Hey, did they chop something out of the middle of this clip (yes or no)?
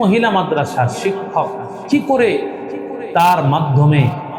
yes